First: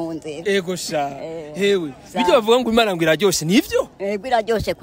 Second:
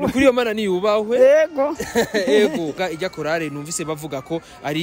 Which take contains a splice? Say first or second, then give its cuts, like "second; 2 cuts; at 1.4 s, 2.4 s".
second; 1 cut; at 2.7 s